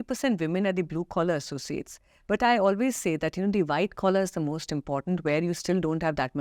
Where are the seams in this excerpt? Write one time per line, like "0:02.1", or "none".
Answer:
none